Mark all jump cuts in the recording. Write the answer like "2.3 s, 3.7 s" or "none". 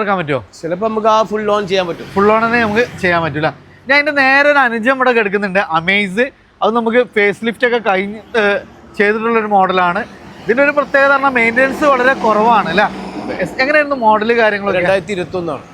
none